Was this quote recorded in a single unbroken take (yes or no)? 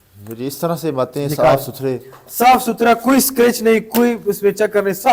yes